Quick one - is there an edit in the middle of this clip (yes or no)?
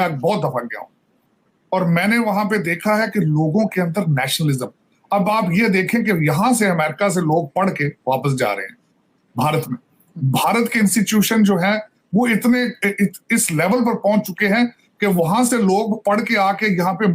no